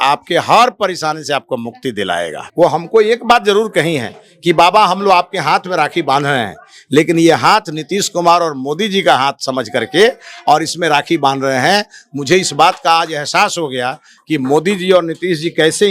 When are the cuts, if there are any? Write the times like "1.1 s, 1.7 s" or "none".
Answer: 2.4 s